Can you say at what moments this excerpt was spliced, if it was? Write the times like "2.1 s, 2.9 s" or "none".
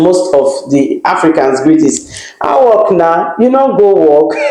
none